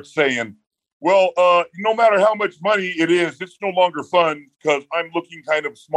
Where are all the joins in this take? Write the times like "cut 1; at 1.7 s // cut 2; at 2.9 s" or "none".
none